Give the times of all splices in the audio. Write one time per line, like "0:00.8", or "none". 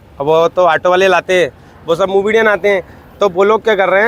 none